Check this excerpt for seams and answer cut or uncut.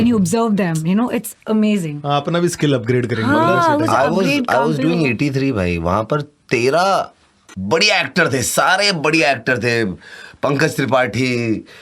uncut